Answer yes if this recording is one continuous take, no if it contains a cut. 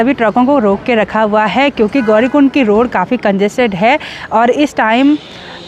yes